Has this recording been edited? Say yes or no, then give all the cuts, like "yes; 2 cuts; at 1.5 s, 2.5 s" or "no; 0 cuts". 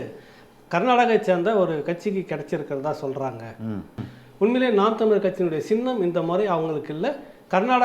yes; 1 cut; at 4.0 s